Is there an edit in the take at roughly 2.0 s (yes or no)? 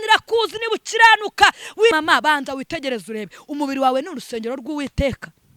yes